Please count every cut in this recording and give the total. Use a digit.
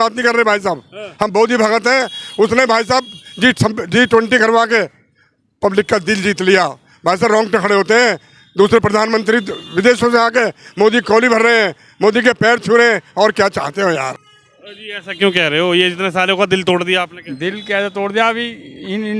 1